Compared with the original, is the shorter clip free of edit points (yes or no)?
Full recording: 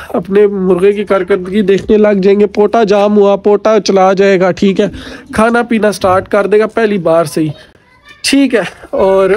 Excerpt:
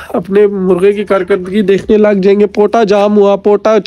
yes